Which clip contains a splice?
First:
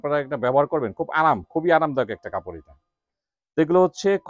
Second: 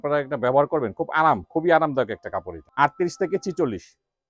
second; 1 cut; at 2.6 s

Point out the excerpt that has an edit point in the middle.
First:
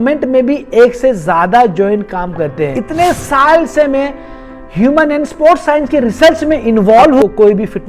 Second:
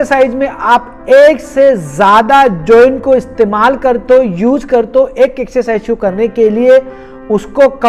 first; 2 cuts; at 2.8 s, 7.2 s

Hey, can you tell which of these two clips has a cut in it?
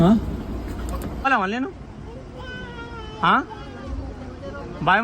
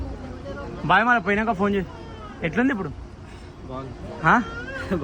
first; 1 cut; at 1.3 s

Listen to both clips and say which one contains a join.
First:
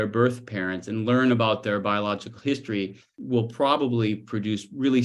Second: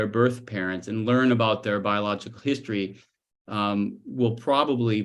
first; 1 cut; at 3.1 s

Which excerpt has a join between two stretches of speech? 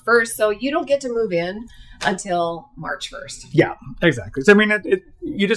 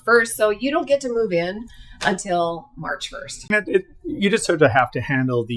second; 1 cut; at 3.5 s

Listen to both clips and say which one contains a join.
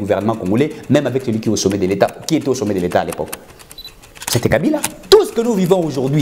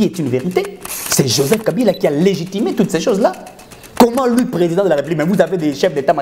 first; 1 cut; at 4.9 s

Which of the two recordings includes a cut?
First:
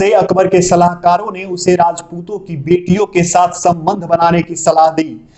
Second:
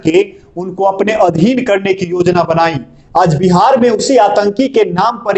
second; 1 cut; at 2.9 s

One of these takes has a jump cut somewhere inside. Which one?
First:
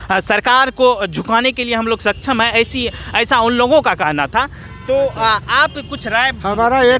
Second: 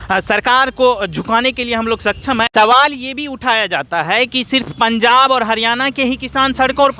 second; 1 cut; at 2.5 s

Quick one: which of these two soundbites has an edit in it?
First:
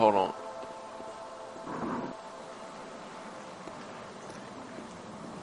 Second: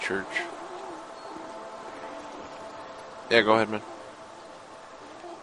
first; 1 cut; at 1.2 s

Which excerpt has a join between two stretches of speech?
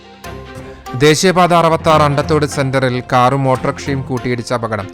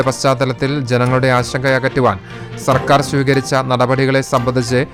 first; 1 cut; at 0.9 s

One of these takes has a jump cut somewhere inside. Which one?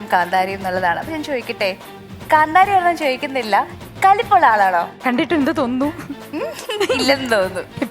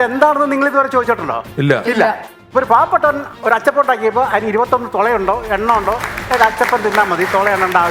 first; 2 cuts; at 5.0 s, 6.3 s

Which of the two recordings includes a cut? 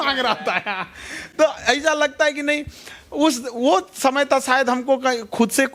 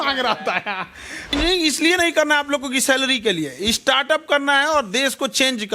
second; 1 cut; at 1.3 s

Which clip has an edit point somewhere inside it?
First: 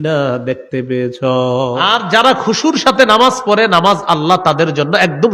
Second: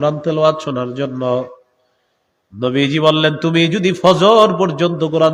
first; 1 cut; at 1.8 s

